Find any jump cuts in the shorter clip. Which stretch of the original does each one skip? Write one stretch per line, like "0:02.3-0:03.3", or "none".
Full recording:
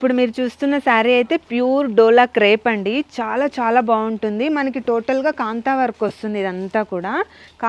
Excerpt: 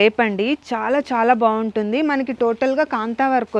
none